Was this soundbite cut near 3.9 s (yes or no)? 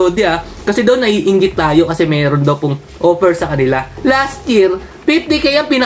yes